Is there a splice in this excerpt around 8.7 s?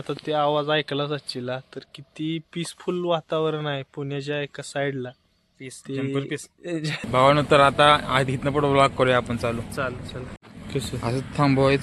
no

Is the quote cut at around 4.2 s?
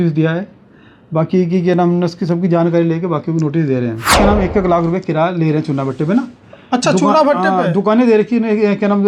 yes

